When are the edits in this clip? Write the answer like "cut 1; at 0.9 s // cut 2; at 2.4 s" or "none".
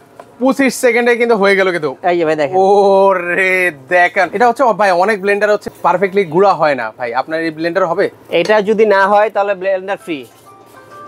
cut 1; at 4.3 s // cut 2; at 5.7 s